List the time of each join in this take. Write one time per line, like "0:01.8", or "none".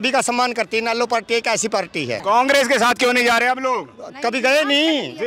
0:02.2